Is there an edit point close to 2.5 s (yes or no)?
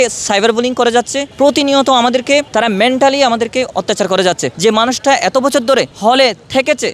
yes